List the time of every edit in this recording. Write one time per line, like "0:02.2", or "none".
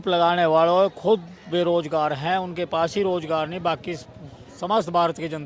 none